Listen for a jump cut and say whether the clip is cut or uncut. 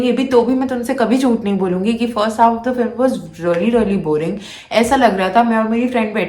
uncut